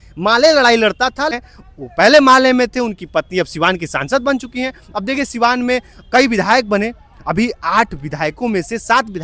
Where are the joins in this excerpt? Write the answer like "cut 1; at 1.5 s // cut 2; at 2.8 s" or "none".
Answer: cut 1; at 1.4 s